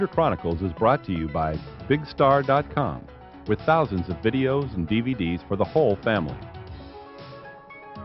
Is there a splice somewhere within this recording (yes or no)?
yes